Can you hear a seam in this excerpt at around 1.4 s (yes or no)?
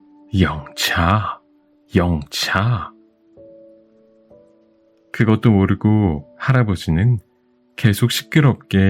no